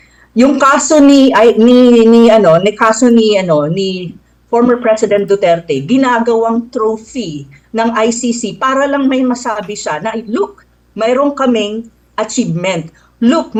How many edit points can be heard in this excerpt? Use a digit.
0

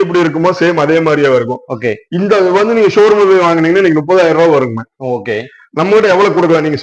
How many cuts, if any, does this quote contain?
0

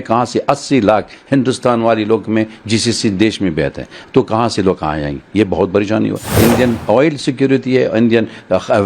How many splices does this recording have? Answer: 1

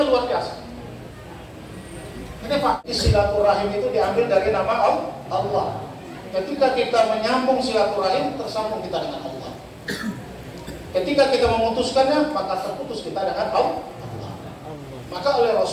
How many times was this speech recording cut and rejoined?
1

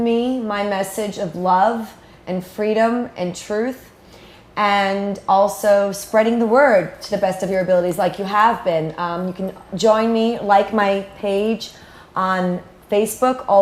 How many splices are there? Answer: 1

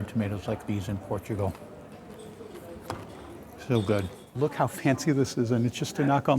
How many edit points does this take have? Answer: 1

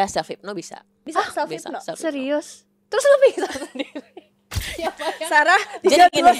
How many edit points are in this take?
0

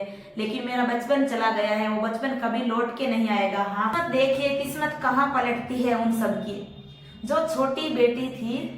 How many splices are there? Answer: 1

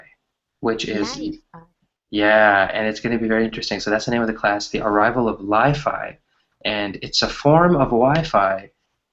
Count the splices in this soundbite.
1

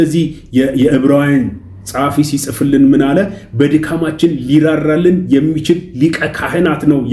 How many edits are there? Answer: 0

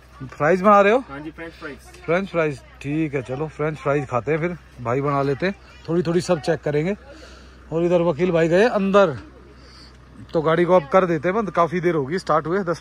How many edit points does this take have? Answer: 0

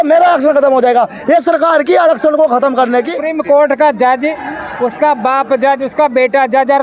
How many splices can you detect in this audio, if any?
1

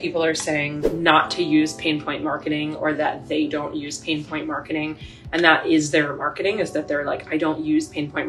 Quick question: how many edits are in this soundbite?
0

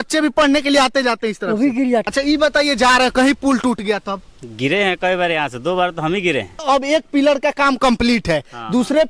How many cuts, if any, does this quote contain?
2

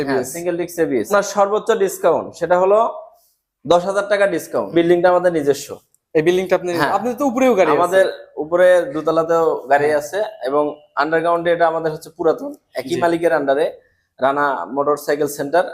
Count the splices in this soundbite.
2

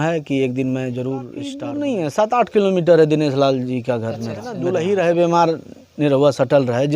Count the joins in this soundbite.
2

